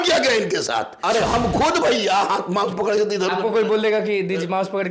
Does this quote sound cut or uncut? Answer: cut